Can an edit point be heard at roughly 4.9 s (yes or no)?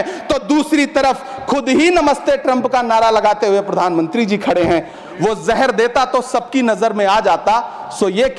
yes